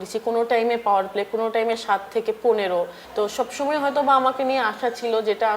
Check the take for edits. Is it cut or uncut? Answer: cut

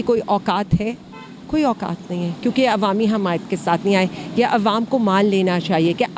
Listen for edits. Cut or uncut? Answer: uncut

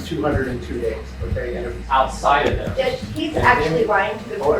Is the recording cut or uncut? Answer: cut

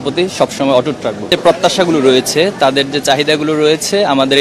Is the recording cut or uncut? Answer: cut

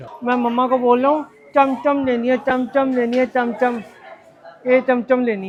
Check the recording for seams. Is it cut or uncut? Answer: uncut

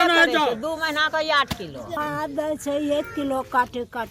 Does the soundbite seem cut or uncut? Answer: cut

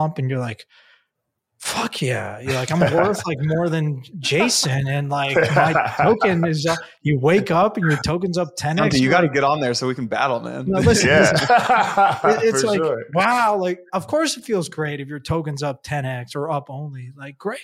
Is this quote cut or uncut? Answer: uncut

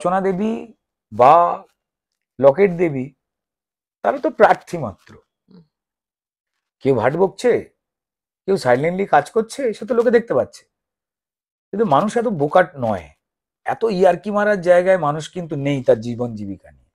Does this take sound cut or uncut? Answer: uncut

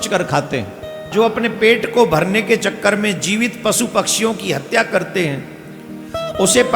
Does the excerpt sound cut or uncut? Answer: cut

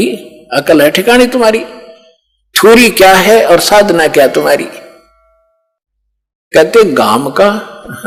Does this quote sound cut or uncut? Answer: uncut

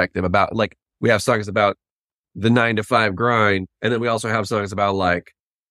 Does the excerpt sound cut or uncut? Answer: uncut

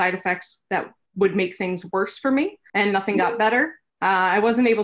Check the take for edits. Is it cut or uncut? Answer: cut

